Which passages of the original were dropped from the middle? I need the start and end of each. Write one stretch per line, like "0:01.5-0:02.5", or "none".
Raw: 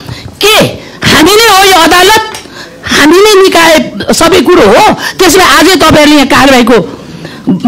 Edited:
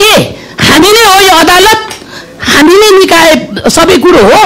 none